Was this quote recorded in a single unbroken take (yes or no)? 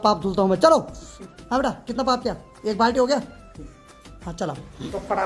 yes